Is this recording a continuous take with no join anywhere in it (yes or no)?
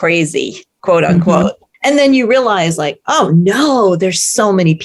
no